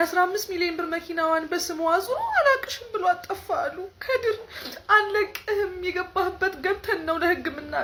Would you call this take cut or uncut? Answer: uncut